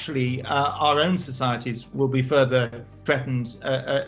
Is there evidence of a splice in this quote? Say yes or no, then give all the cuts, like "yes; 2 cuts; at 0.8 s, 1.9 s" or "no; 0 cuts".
yes; 2 cuts; at 1.9 s, 3.0 s